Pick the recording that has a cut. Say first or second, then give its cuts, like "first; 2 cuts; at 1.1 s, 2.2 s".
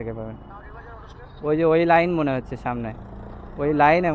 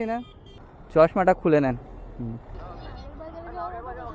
second; 1 cut; at 2.9 s